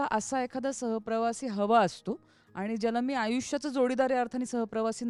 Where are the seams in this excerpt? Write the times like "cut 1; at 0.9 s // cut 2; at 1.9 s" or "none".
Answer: none